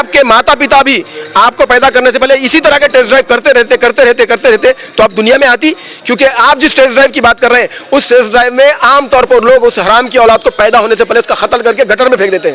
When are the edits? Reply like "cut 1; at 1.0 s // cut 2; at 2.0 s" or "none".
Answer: none